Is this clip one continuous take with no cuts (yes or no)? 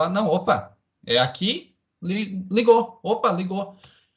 yes